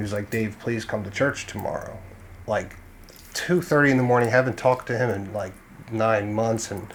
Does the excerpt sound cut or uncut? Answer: uncut